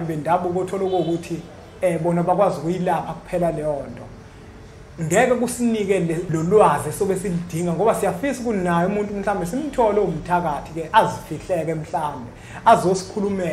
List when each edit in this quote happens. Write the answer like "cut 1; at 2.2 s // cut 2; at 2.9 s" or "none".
cut 1; at 6.3 s

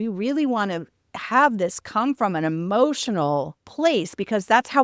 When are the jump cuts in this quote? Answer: cut 1; at 3.6 s

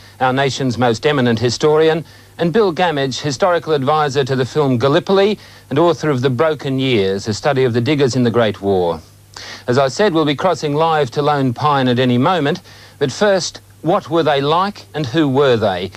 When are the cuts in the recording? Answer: cut 1; at 6.0 s

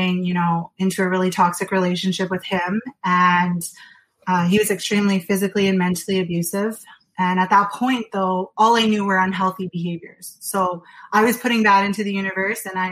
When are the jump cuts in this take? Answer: none

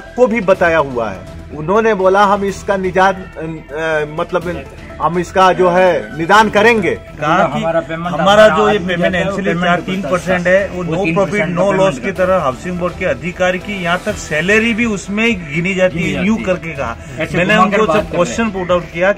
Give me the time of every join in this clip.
cut 1; at 7.1 s

